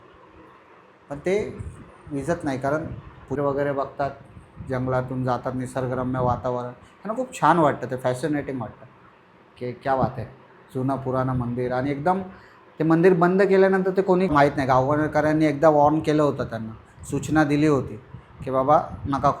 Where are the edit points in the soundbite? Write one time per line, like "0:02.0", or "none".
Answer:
0:03.4
0:14.3